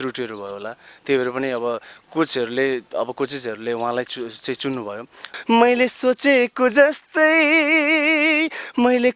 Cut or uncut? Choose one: cut